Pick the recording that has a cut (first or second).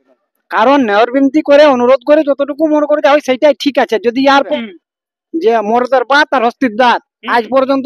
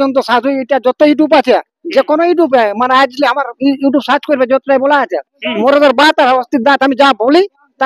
first